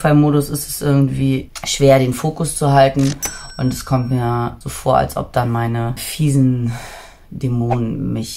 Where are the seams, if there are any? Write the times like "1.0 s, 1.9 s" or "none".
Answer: 1.6 s, 4.7 s, 6.1 s